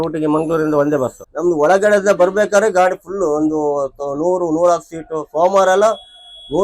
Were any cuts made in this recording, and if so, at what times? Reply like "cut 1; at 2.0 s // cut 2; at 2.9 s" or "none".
cut 1; at 1.2 s